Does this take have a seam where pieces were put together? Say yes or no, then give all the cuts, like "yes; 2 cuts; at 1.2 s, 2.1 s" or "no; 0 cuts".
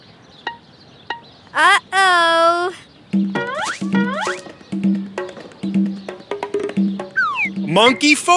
yes; 1 cut; at 6.9 s